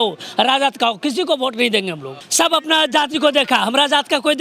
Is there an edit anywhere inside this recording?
yes; 1 cut; at 2.2 s

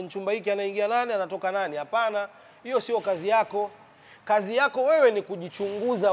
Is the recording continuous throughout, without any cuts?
yes; 0 cuts

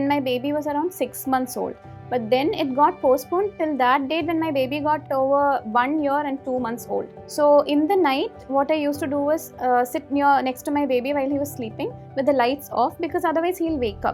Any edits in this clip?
yes; 2 cuts; at 5.1 s, 7.2 s

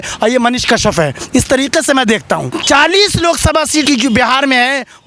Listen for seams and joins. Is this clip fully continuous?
no; 2 cuts; at 2.5 s, 3.9 s

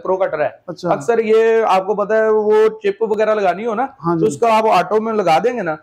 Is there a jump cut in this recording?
no; 0 cuts

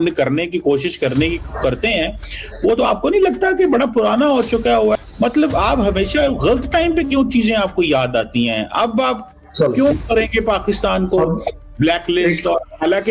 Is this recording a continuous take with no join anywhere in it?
no; 1 cut; at 5.0 s

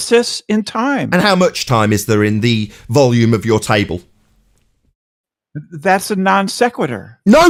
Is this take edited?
no; 0 cuts

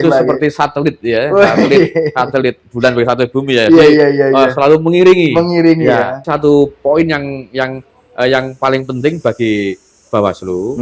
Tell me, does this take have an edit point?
yes; 1 cut; at 6.3 s

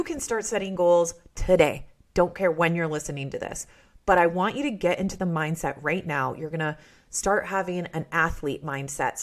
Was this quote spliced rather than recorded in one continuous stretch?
no; 0 cuts

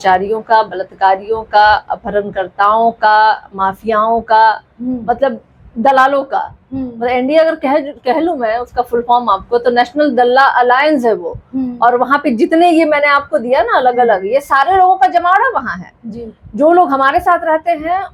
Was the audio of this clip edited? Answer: no; 0 cuts

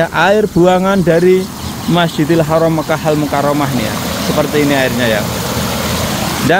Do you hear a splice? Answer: no; 0 cuts

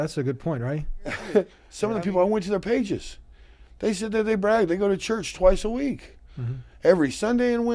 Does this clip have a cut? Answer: yes; 1 cut; at 1.6 s

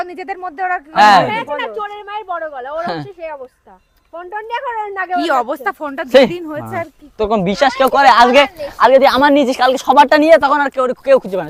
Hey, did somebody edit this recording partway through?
no; 0 cuts

